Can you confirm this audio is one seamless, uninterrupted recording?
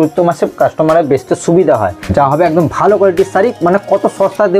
no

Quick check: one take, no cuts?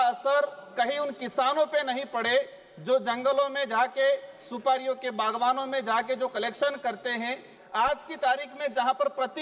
no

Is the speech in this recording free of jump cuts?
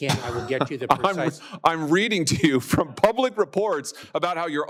yes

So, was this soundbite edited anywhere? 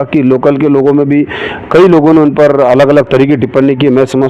no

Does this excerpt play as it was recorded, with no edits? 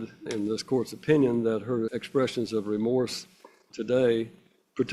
yes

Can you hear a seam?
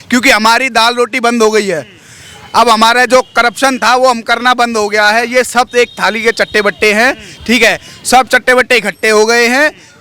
no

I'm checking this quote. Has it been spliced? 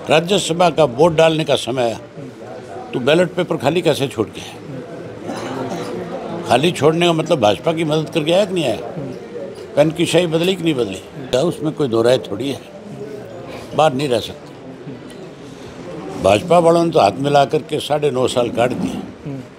yes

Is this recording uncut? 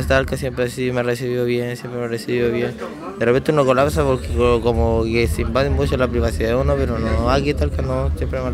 yes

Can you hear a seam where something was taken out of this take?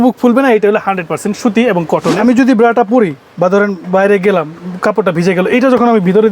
yes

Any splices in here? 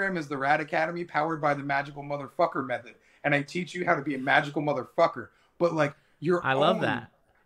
no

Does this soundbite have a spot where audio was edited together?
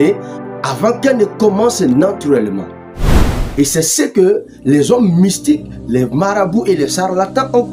no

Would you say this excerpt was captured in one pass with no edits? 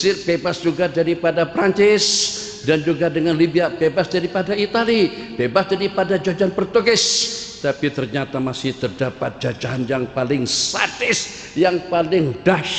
yes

